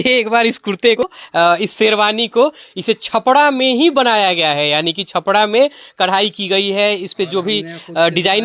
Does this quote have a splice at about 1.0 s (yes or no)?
yes